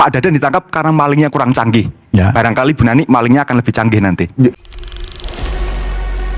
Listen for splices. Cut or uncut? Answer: cut